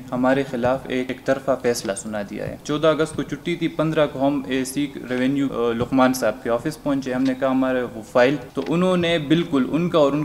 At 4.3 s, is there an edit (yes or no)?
no